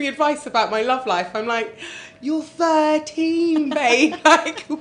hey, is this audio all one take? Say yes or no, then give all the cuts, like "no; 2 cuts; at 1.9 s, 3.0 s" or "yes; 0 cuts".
yes; 0 cuts